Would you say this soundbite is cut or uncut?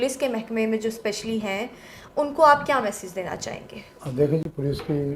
uncut